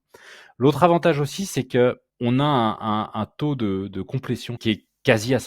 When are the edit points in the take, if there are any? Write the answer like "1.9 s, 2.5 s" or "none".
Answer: 2.1 s, 4.6 s